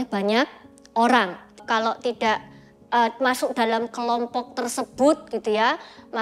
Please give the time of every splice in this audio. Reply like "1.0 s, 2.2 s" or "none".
1.6 s